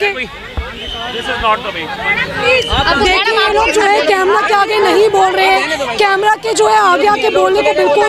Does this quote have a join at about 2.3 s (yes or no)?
no